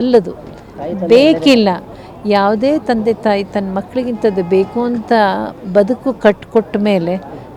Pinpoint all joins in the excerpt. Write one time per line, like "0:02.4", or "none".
none